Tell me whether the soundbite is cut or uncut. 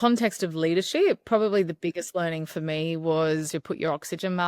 cut